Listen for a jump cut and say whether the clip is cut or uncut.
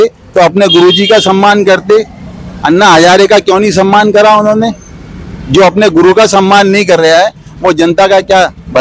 uncut